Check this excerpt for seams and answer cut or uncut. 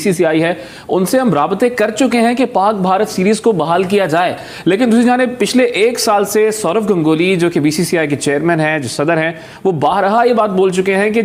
uncut